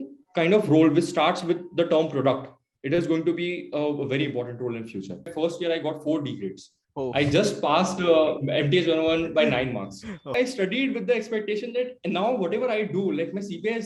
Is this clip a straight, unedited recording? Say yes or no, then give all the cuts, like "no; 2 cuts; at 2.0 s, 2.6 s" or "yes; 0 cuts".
no; 2 cuts; at 5.3 s, 10.3 s